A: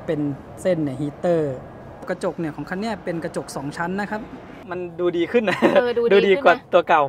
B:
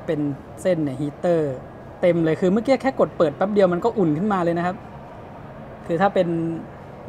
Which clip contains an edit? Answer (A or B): A